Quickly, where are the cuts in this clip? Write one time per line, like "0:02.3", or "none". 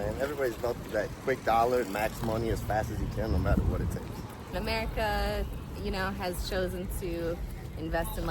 none